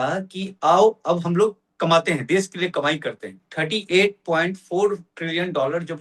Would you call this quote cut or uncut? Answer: cut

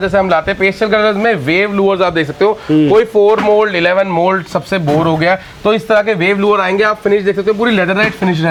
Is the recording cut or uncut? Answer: uncut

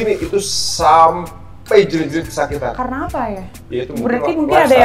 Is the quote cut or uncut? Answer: uncut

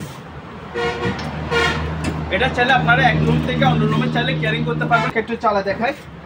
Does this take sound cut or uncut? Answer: cut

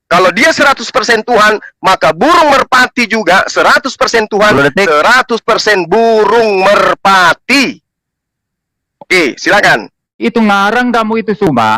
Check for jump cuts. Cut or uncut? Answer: cut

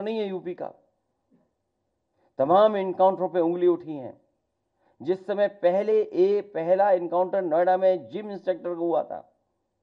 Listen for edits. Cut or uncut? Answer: uncut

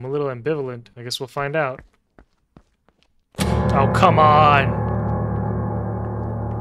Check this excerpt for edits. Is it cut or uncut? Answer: cut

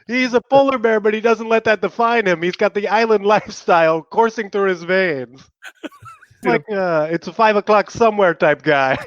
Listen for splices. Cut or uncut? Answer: cut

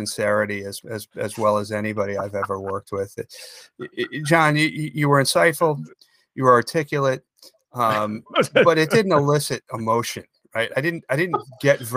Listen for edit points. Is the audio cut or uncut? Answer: uncut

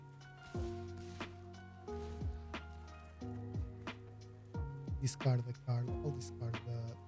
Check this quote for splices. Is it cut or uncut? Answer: cut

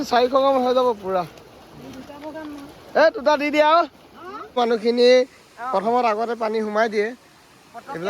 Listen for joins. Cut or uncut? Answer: cut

